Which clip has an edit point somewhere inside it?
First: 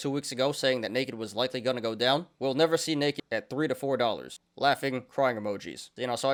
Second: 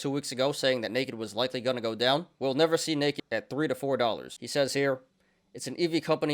second; 1 cut; at 4.4 s

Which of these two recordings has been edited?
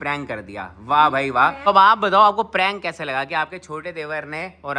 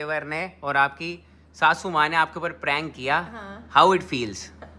first; 1 cut; at 1.6 s

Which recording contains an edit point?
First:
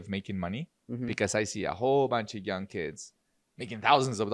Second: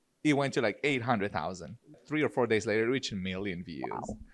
second; 1 cut; at 2.0 s

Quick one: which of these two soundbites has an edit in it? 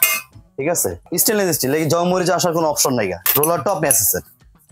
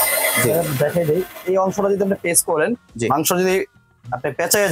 first; 2 cuts; at 1.1 s, 3.2 s

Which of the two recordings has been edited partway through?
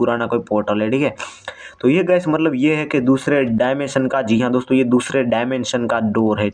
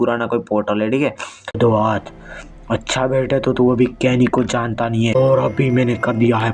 second; 2 cuts; at 1.6 s, 5.2 s

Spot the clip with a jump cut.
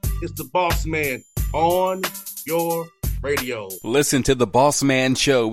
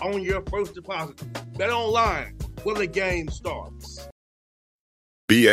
second; 1 cut; at 4.0 s

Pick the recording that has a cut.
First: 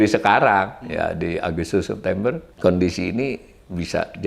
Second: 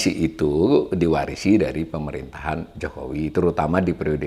first; 1 cut; at 2.5 s

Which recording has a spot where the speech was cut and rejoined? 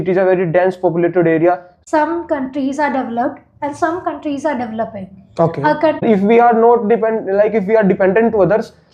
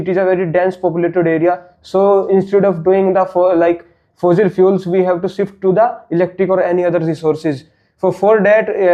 first; 2 cuts; at 1.7 s, 6.0 s

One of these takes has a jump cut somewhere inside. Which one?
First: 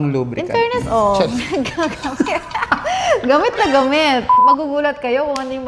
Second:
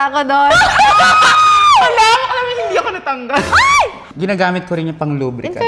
second; 1 cut; at 4.0 s

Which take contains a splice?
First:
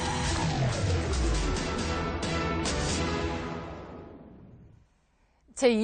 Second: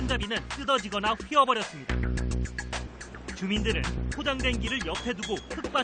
first; 1 cut; at 0.9 s

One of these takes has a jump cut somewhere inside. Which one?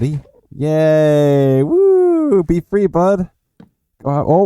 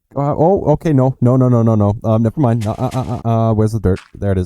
second; 1 cut; at 3.2 s

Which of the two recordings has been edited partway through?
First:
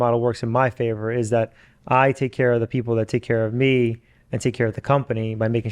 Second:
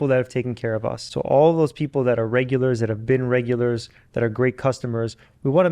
second; 1 cut; at 1.0 s

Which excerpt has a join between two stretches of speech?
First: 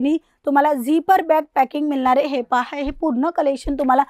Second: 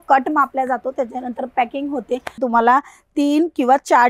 second; 1 cut; at 2.4 s

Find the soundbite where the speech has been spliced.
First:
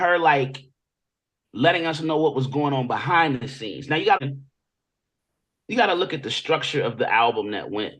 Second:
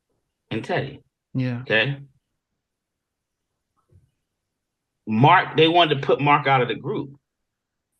first; 1 cut; at 4.2 s

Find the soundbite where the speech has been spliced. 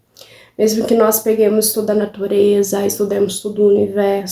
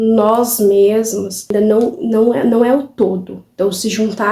second; 1 cut; at 1.5 s

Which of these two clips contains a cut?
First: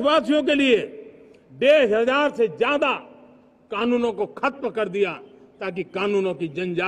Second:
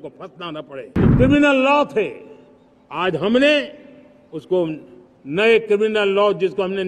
second; 1 cut; at 0.9 s

